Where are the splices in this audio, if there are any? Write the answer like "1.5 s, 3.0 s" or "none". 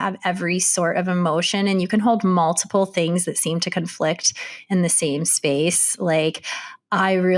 none